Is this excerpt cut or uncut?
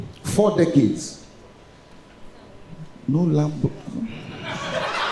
uncut